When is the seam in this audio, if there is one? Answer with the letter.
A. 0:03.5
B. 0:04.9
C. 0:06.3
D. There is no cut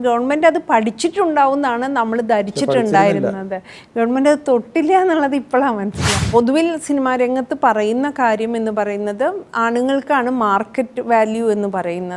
C